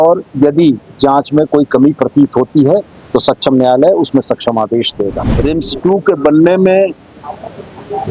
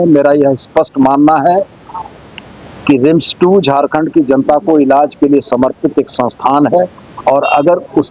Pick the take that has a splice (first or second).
first